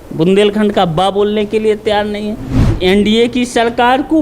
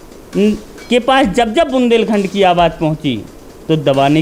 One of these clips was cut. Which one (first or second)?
first